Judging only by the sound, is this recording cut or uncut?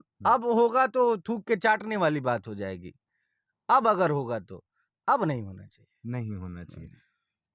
uncut